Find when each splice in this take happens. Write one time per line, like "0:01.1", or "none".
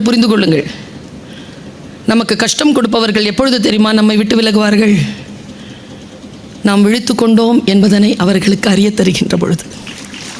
none